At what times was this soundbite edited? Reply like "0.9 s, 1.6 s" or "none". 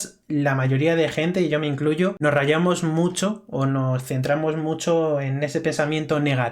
2.2 s